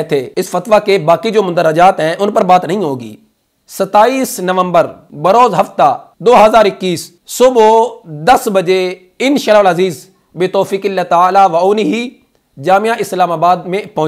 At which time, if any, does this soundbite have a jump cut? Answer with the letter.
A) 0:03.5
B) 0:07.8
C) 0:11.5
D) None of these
A